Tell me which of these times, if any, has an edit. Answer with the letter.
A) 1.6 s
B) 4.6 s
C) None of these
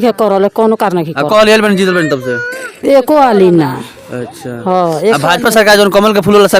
C